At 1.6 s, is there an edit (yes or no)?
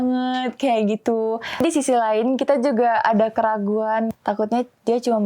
yes